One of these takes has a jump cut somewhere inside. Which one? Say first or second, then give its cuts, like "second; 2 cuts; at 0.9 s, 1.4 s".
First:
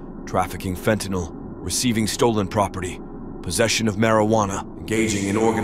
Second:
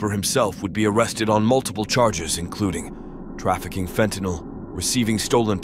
first; 1 cut; at 4.7 s